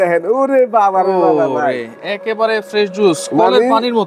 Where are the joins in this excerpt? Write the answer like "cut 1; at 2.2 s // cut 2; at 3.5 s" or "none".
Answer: none